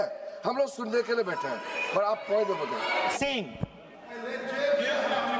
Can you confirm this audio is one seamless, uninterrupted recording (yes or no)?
no